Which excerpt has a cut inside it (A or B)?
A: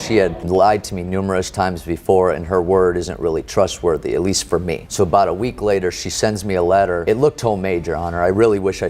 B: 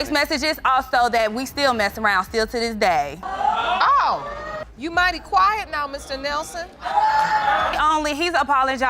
B